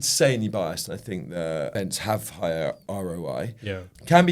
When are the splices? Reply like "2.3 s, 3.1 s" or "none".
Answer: 1.7 s, 2.8 s